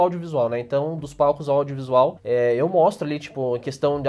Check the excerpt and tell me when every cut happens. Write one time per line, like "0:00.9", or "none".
0:02.2

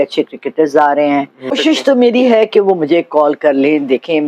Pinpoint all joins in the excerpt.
0:01.6

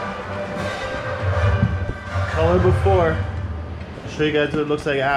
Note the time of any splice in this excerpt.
none

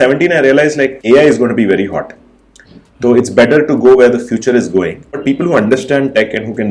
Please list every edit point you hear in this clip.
0:01.0
0:05.0

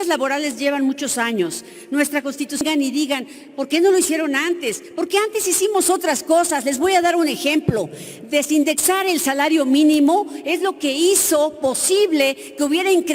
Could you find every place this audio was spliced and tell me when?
0:02.6

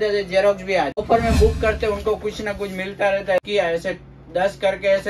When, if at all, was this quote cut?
0:01.0
0:03.4

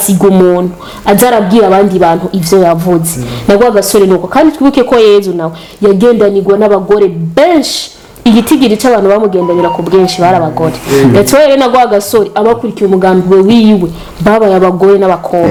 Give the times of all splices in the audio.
none

